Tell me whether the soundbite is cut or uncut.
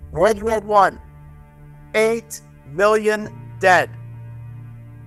uncut